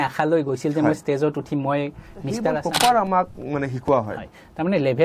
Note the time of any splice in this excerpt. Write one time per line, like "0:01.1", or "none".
0:02.6